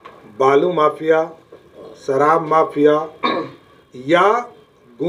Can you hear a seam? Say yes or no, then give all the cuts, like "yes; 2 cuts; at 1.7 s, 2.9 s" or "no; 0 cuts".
no; 0 cuts